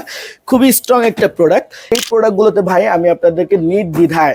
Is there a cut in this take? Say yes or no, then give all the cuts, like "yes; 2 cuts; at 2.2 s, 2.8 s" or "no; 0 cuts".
yes; 1 cut; at 1.8 s